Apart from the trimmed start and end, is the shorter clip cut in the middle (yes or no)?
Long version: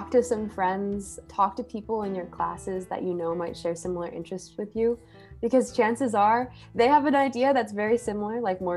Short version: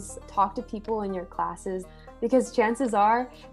yes